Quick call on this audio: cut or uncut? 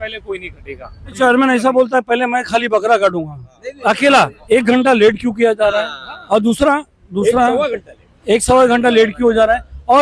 cut